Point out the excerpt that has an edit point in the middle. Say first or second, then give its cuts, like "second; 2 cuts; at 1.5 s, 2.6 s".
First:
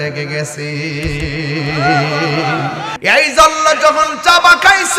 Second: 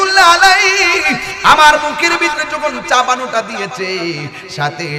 first; 1 cut; at 2.9 s